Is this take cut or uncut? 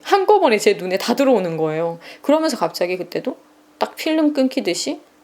uncut